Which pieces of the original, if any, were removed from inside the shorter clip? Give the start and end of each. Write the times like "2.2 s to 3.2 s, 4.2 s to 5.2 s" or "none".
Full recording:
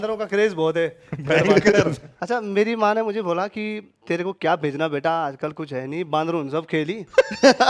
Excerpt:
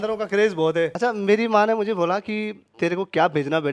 0.9 s to 2.2 s